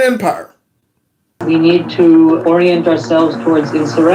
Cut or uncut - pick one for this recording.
cut